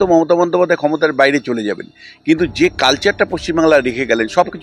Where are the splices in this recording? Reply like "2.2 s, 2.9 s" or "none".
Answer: none